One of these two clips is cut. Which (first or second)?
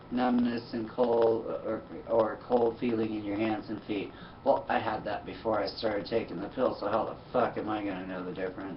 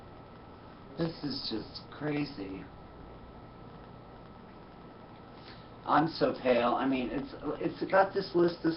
second